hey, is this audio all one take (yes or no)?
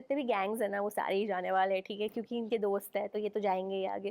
yes